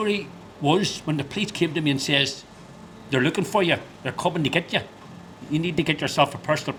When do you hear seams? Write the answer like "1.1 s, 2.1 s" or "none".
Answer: none